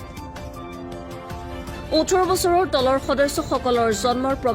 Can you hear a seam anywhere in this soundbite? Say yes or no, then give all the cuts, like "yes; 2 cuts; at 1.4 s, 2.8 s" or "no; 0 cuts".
yes; 1 cut; at 1.5 s